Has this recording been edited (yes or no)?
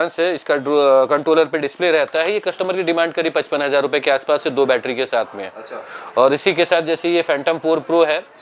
no